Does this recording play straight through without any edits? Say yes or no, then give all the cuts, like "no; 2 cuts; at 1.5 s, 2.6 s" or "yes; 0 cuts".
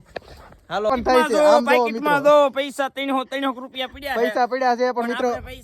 no; 2 cuts; at 0.9 s, 4.4 s